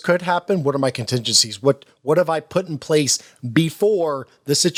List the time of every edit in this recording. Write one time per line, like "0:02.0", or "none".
none